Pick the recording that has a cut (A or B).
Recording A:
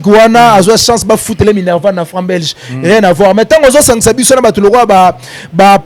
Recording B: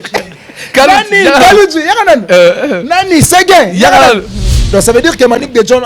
B